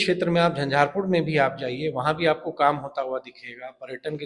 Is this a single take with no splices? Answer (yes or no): yes